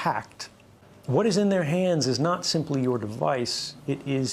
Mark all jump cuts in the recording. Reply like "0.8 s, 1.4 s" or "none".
none